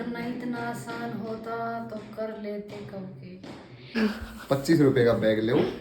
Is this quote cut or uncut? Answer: cut